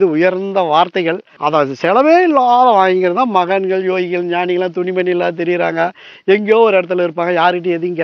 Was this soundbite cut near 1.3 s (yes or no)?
yes